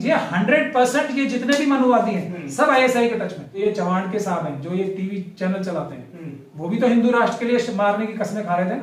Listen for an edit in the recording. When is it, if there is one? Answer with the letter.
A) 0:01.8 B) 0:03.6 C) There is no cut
B